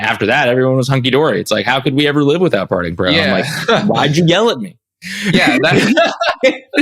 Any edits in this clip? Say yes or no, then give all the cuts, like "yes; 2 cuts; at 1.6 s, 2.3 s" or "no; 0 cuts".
no; 0 cuts